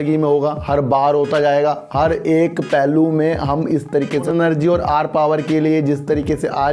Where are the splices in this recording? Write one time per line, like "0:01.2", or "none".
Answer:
0:04.3